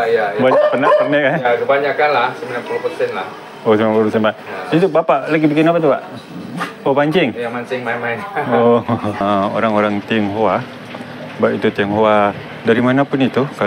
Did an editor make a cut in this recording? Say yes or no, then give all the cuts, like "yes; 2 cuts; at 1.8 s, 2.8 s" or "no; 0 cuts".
yes; 1 cut; at 9.2 s